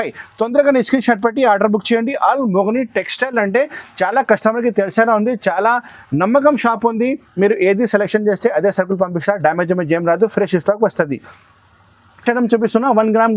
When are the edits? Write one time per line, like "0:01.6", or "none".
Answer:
none